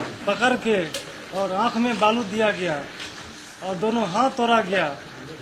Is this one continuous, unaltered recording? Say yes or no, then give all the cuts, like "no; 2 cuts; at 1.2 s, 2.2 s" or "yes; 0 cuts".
yes; 0 cuts